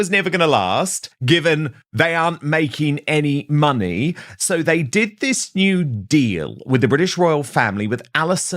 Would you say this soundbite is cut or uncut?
cut